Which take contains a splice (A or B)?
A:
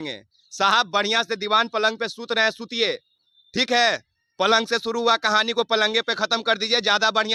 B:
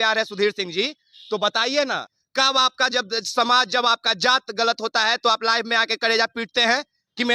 B